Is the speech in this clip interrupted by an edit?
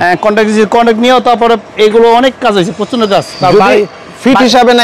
no; 0 cuts

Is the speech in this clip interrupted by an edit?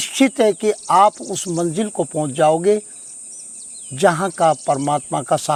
no; 0 cuts

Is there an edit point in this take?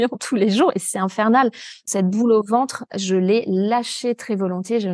yes; 1 cut; at 1.7 s

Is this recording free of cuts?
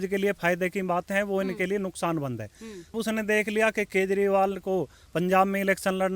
no; 1 cut; at 2.9 s

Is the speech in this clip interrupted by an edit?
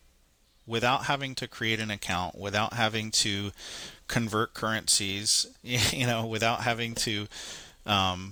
no; 0 cuts

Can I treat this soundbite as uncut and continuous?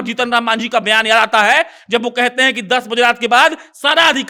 yes; 0 cuts

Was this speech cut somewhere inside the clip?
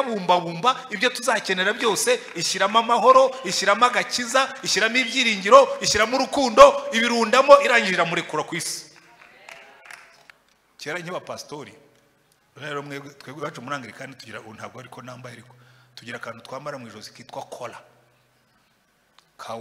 yes; 1 cut; at 10.3 s

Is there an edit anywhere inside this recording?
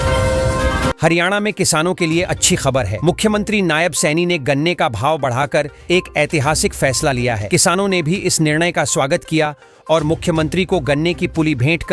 yes; 1 cut; at 1.0 s

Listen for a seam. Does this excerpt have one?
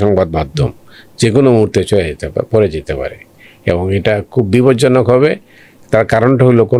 no; 0 cuts

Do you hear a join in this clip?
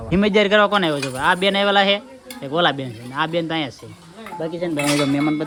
no; 0 cuts

